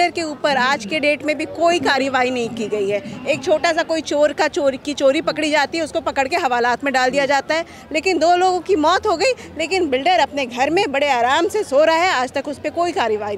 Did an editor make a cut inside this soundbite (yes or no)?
no